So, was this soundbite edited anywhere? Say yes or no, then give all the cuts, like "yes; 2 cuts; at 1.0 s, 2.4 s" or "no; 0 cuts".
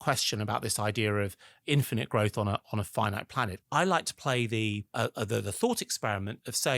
yes; 3 cuts; at 1.5 s, 3.6 s, 4.9 s